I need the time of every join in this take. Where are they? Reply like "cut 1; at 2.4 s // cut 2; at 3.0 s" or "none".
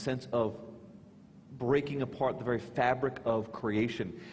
cut 1; at 3.4 s